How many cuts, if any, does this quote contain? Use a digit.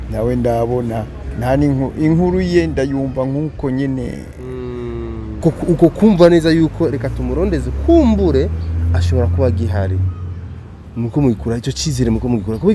1